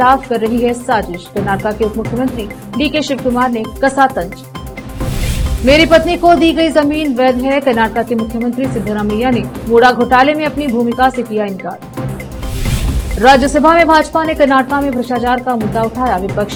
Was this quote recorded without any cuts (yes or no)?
yes